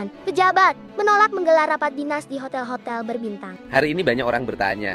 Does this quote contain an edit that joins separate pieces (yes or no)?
yes